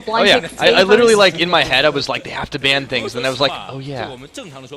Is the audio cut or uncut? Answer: cut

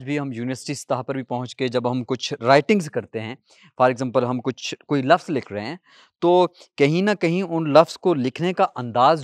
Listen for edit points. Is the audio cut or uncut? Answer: uncut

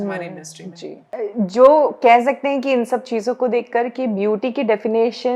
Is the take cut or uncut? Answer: uncut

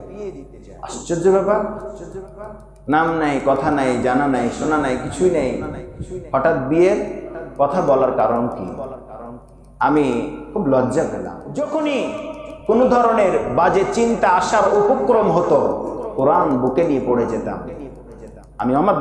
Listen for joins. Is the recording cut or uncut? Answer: cut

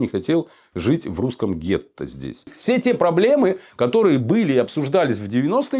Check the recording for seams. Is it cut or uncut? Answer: cut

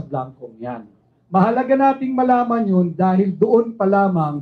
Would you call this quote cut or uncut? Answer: uncut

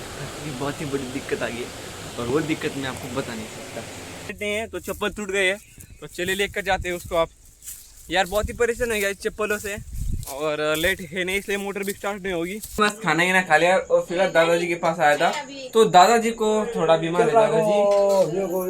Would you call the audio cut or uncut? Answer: cut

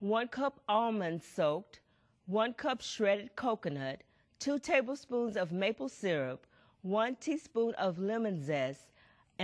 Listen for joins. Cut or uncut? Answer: cut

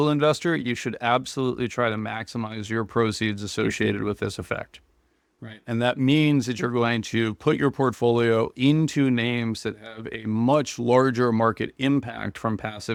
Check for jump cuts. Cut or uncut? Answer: uncut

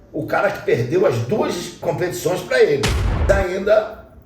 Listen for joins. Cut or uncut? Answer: cut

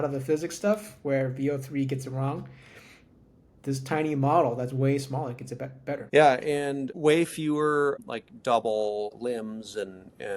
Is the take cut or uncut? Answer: cut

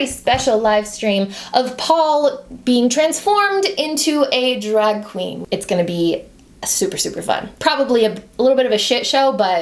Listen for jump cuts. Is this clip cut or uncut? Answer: cut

